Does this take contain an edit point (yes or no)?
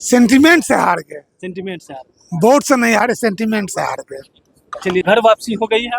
yes